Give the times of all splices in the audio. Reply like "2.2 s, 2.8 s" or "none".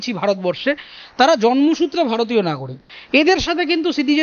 none